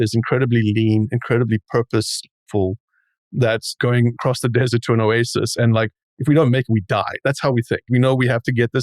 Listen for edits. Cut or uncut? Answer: cut